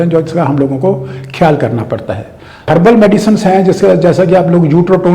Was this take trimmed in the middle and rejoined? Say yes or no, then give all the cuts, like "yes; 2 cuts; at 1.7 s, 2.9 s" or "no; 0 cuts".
yes; 1 cut; at 2.7 s